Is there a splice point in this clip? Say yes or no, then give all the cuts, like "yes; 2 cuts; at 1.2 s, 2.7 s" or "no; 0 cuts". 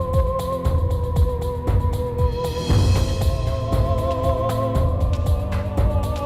no; 0 cuts